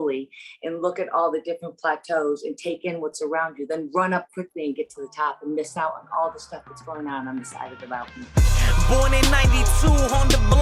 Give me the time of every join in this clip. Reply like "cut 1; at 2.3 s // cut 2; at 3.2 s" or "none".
cut 1; at 8.2 s

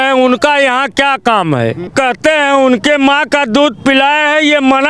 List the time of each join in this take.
cut 1; at 1.9 s

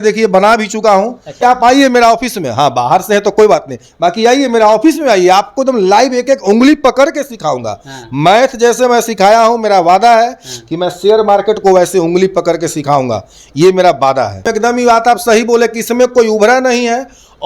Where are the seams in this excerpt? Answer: cut 1; at 1.4 s // cut 2; at 14.5 s

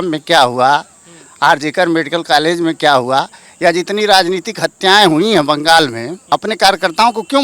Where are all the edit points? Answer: cut 1; at 6.1 s

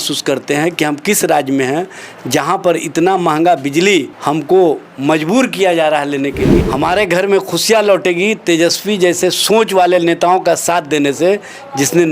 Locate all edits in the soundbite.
cut 1; at 4.1 s // cut 2; at 6.6 s

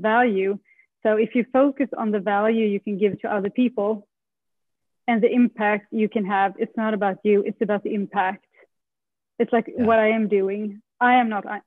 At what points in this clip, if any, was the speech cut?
none

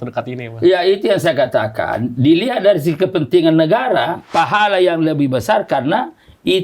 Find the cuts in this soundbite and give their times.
cut 1; at 4.2 s

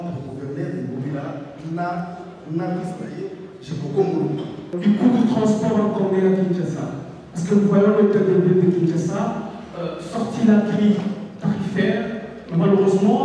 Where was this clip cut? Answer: cut 1; at 4.8 s

